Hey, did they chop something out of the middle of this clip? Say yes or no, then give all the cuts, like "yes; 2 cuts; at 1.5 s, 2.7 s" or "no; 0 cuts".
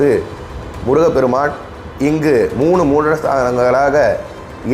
no; 0 cuts